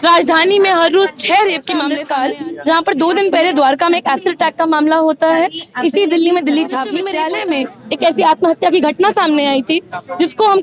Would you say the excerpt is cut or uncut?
cut